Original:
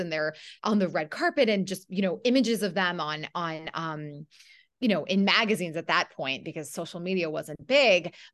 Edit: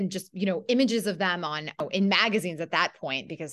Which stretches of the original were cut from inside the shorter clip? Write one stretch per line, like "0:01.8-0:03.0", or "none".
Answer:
0:03.4-0:05.0